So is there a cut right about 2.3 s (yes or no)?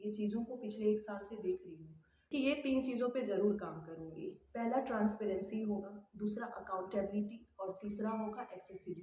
yes